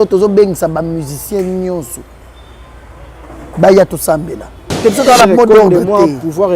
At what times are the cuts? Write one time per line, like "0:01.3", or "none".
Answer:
0:04.7

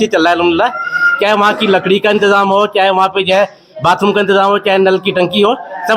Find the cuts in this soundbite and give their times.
none

